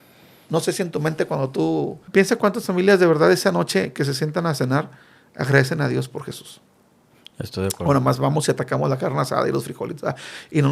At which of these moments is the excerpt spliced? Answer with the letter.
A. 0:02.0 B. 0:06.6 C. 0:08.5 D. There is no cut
A